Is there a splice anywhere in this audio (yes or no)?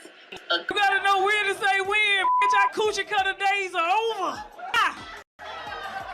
yes